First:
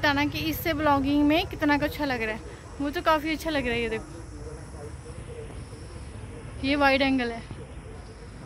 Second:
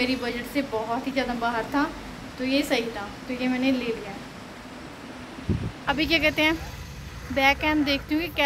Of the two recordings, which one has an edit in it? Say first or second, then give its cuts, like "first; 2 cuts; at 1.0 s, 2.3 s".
second; 1 cut; at 5.9 s